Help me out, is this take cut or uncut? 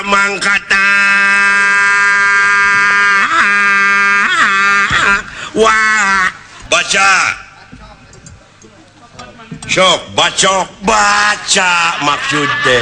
cut